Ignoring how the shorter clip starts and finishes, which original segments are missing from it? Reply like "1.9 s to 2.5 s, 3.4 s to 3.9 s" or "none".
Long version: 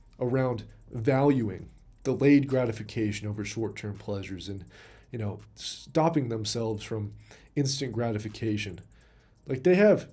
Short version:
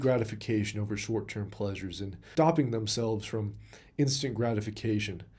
4.7 s to 5.8 s